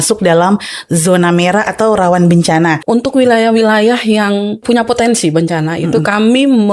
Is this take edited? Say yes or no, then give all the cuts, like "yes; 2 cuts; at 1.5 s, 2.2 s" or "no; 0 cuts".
yes; 2 cuts; at 2.8 s, 4.6 s